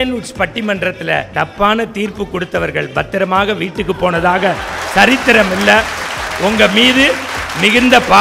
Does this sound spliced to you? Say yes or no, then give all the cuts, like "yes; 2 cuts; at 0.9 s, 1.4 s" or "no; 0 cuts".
yes; 1 cut; at 1.3 s